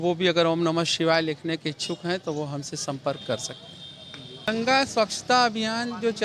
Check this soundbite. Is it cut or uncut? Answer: cut